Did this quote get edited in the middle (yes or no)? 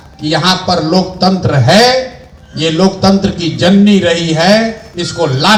no